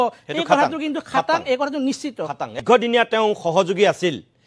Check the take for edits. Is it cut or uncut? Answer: cut